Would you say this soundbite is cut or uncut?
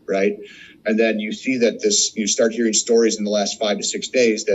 uncut